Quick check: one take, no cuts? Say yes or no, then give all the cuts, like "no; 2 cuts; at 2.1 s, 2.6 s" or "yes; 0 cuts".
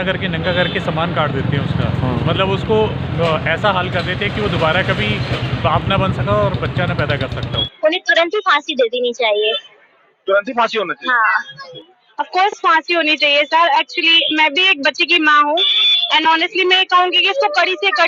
no; 2 cuts; at 7.6 s, 11.8 s